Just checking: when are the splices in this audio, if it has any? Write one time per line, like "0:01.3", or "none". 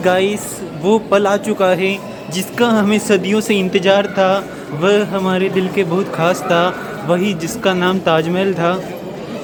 none